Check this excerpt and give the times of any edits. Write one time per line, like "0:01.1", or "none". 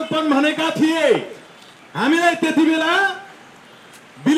none